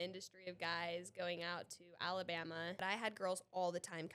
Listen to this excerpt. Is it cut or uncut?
cut